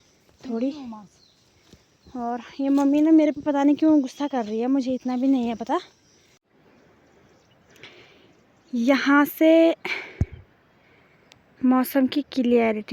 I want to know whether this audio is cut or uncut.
cut